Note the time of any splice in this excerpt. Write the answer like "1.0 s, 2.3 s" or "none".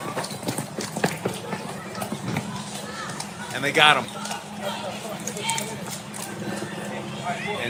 none

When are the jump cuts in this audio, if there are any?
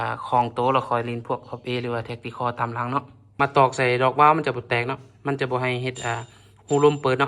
3.3 s

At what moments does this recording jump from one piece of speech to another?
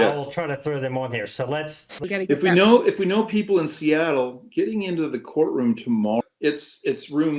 2.0 s, 6.2 s

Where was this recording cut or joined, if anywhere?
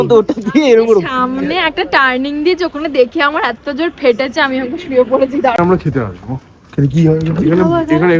5.6 s

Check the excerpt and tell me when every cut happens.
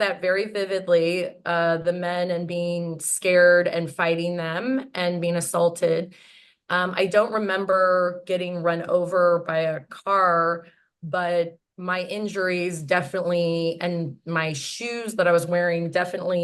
none

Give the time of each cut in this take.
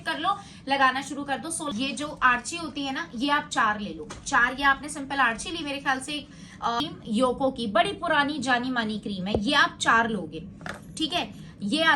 1.7 s, 6.8 s

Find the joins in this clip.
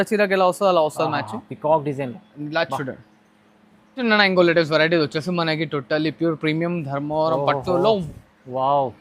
4.0 s

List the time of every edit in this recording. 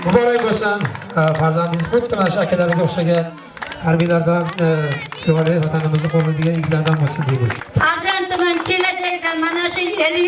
7.6 s

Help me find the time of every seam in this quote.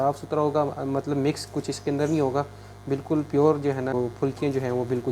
3.9 s

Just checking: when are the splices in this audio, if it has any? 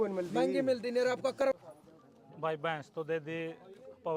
1.6 s

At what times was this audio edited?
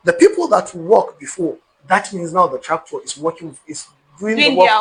none

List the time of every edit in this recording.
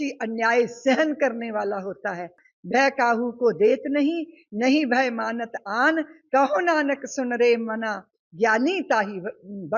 2.5 s

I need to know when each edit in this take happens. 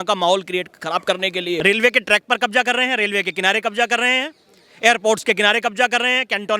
1.6 s

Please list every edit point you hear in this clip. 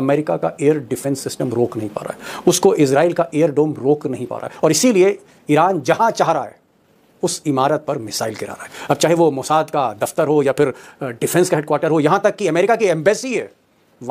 none

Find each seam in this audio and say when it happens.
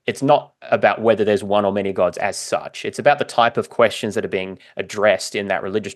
none

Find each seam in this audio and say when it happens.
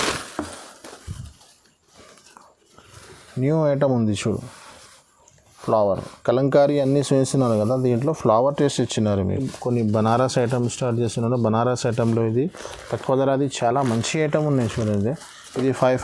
9.5 s

